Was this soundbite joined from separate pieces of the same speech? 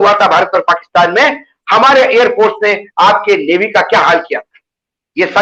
no; 0 cuts

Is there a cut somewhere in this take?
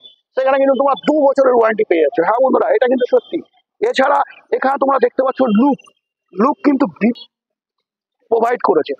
yes; 1 cut; at 7.3 s

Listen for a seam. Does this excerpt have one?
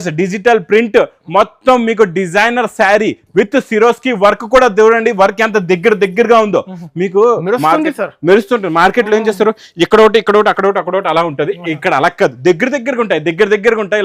no; 0 cuts

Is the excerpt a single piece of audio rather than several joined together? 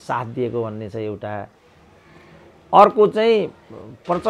yes; 0 cuts

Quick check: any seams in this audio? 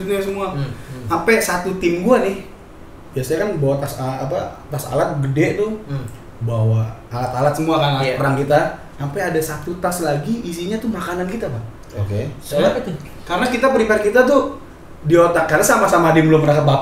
no; 0 cuts

